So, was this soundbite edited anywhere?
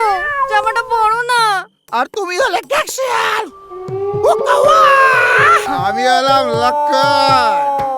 yes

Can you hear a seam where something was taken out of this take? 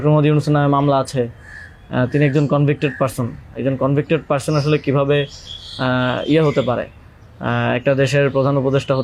no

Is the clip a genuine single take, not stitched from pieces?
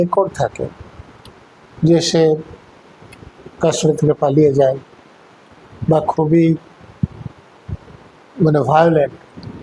yes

